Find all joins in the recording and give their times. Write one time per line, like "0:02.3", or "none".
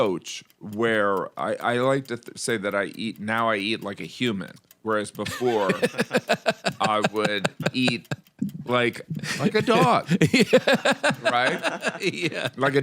none